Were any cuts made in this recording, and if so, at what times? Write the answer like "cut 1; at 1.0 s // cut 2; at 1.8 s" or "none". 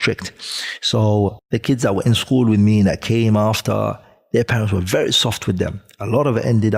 cut 1; at 1.4 s